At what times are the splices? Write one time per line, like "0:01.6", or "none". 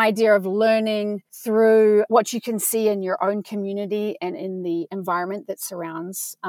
0:01.3